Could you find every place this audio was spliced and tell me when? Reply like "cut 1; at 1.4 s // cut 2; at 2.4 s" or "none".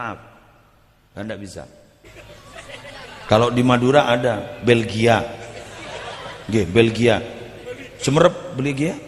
cut 1; at 2.1 s